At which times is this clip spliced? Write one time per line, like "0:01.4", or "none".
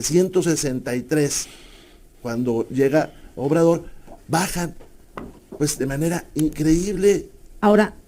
none

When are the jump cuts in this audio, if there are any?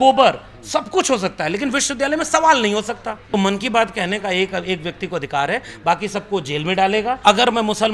0:03.2
0:07.2

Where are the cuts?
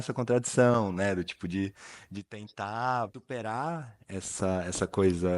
0:03.2

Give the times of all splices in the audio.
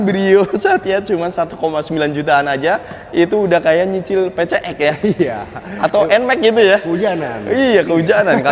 none

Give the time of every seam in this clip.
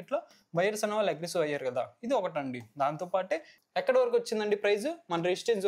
0:03.5

